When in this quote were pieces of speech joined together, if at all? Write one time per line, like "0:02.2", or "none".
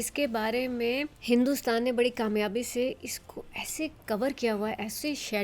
0:01.1